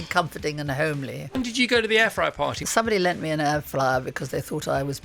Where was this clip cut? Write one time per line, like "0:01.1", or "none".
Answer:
0:01.4
0:02.6